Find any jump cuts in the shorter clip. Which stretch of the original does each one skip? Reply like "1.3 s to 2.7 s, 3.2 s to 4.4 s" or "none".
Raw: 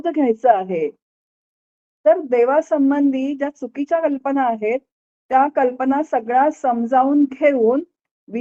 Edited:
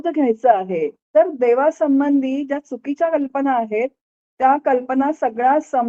1.0 s to 1.9 s